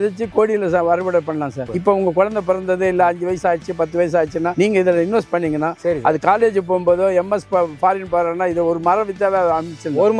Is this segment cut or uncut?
cut